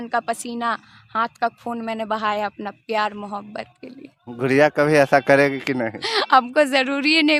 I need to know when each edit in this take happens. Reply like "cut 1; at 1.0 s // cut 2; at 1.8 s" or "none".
none